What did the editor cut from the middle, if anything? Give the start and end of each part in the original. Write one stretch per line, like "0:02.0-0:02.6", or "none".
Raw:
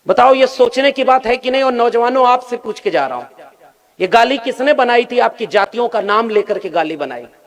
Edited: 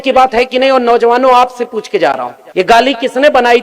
0:03.3-0:03.8